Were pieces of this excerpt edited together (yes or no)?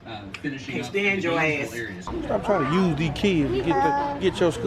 yes